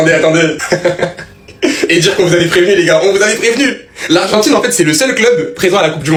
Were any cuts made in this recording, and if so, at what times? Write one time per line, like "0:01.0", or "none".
none